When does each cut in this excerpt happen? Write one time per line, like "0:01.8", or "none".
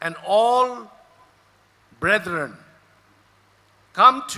0:01.9